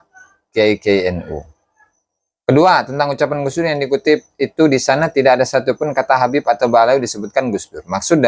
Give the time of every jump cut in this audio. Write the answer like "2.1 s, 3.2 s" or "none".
none